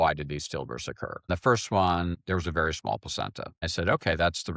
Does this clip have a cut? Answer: yes; 3 cuts; at 1.3 s, 2.2 s, 3.6 s

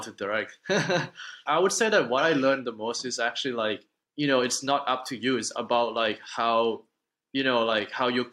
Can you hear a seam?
yes; 2 cuts; at 1.4 s, 4.0 s

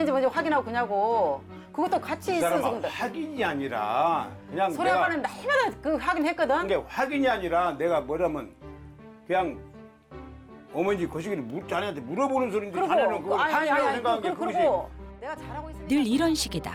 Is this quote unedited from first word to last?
yes; 0 cuts

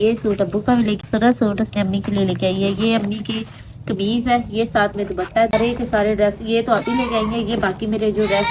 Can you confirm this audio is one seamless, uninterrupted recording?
no; 2 cuts; at 1.0 s, 5.5 s

